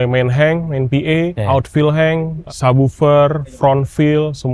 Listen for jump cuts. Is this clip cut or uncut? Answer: uncut